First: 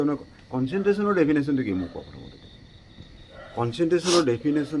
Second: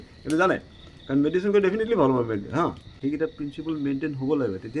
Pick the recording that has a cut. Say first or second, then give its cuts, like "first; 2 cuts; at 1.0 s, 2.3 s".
second; 1 cut; at 3.1 s